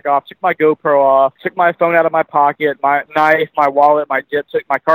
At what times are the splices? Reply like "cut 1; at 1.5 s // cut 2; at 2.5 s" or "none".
cut 1; at 1.4 s // cut 2; at 3.1 s